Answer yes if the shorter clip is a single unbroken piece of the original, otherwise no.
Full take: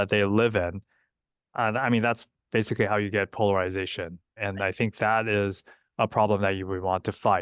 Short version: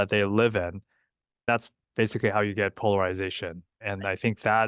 no